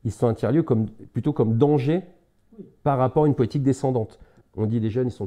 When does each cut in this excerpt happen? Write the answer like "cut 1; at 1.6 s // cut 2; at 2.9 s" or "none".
cut 1; at 4.3 s

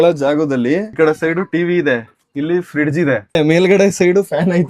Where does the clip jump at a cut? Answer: cut 1; at 0.9 s // cut 2; at 3.4 s

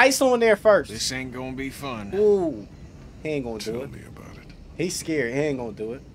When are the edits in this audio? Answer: none

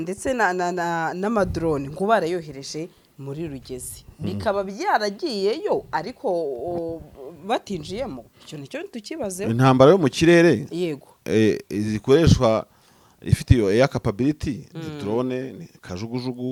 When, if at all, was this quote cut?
none

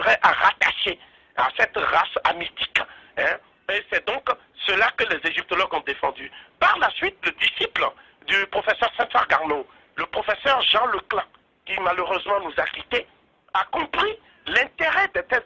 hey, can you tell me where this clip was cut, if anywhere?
cut 1; at 2.0 s

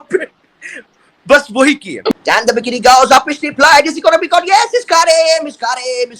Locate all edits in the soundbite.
cut 1; at 2.2 s

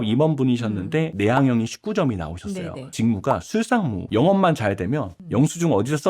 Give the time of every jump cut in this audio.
cut 1; at 1.1 s // cut 2; at 2.9 s // cut 3; at 4.0 s

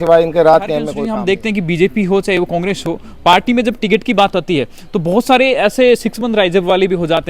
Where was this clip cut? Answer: cut 1; at 1.0 s

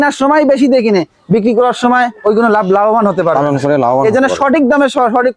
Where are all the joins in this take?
none

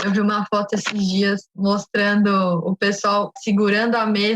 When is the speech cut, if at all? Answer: cut 1; at 1.6 s

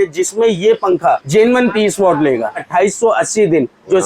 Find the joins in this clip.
cut 1; at 1.2 s // cut 2; at 2.7 s

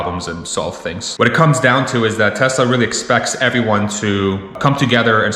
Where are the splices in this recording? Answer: cut 1; at 1.1 s

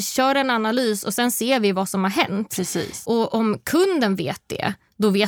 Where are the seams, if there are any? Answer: cut 1; at 3.0 s

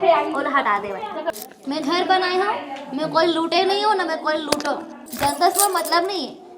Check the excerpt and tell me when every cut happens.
cut 1; at 1.2 s // cut 2; at 5.0 s

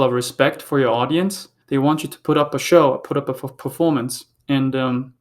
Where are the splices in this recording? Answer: cut 1; at 1.5 s

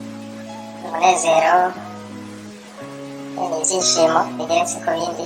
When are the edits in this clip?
cut 1; at 0.9 s // cut 2; at 1.7 s // cut 3; at 3.4 s

